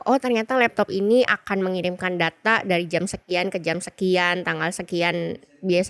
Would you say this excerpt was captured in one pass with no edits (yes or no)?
yes